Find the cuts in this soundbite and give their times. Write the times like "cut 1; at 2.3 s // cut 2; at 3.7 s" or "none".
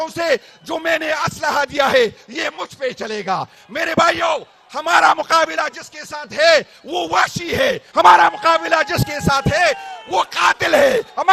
none